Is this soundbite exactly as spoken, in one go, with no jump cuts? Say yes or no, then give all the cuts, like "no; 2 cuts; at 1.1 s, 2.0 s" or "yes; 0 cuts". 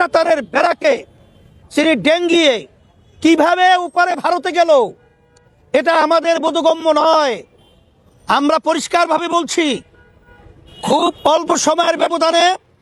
yes; 0 cuts